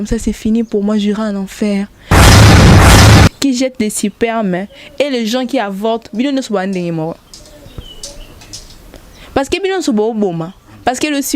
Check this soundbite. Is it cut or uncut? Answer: cut